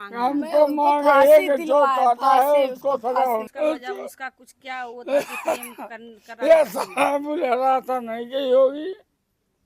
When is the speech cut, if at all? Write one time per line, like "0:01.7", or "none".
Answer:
0:03.5